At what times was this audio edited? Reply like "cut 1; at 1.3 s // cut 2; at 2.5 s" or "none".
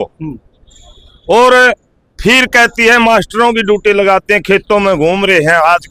none